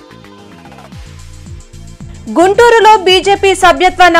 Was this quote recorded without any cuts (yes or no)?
no